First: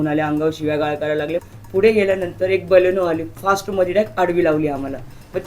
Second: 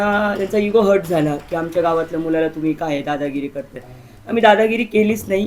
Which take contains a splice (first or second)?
first